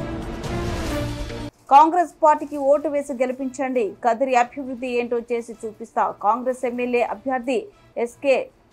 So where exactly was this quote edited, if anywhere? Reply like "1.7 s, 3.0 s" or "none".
1.5 s